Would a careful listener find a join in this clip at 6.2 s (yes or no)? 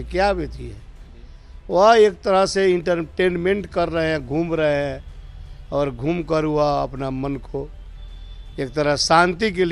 no